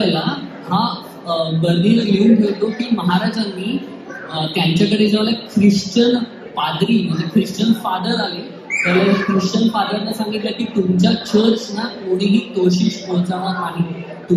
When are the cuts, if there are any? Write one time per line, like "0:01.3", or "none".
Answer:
none